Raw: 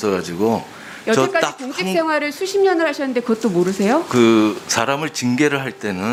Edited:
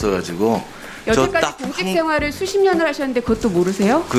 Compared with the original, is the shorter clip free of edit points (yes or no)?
yes